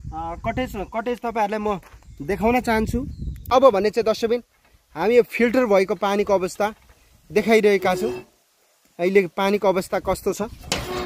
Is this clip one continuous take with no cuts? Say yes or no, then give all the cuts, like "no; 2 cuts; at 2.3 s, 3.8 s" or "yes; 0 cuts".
no; 1 cut; at 3.4 s